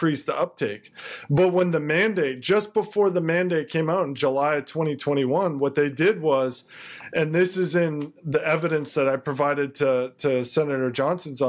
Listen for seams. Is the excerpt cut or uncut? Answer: uncut